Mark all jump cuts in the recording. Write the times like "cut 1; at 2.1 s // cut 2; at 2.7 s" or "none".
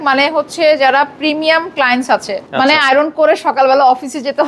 cut 1; at 2.4 s

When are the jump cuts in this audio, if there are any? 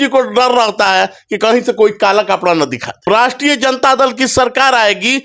cut 1; at 3.0 s

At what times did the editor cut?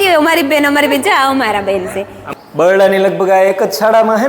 cut 1; at 2.1 s

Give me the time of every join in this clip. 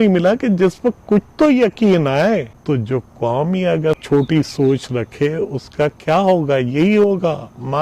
cut 1; at 2.5 s // cut 2; at 3.9 s

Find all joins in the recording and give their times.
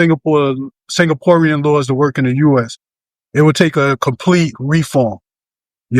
none

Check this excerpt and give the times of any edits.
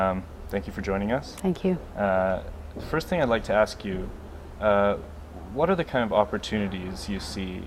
cut 1; at 6.7 s

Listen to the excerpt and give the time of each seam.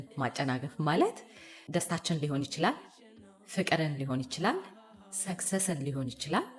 cut 1; at 1.5 s

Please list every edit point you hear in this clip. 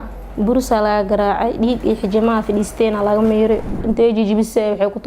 cut 1; at 3.8 s

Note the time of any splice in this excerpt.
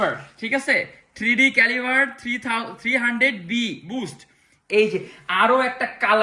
cut 1; at 4.6 s

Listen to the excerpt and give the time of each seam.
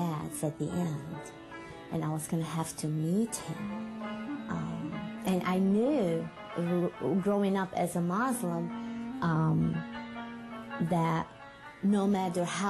cut 1; at 3.6 s

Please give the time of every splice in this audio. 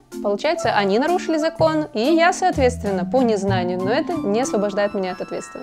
cut 1; at 4.1 s

